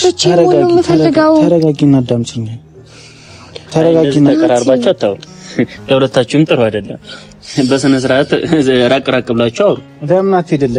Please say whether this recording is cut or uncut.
uncut